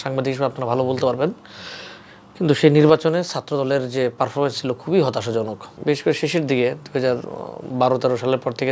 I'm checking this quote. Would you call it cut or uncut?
cut